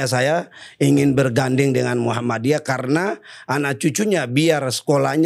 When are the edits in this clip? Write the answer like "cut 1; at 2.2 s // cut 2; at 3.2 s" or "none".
none